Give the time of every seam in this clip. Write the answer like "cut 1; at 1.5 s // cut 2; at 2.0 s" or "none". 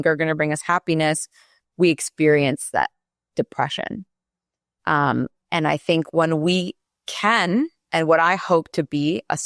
none